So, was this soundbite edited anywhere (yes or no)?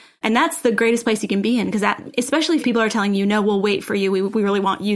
yes